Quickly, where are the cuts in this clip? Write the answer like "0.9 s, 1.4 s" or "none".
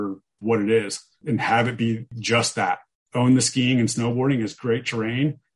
1.2 s, 2.5 s